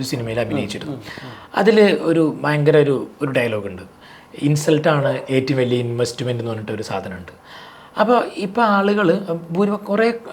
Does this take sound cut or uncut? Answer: uncut